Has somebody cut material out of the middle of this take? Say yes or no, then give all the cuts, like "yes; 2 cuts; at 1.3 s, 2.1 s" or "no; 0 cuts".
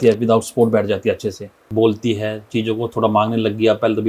yes; 1 cut; at 1.6 s